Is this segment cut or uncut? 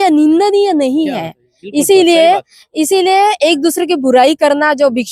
uncut